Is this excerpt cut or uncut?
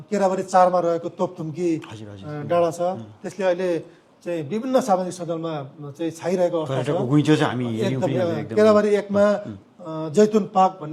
uncut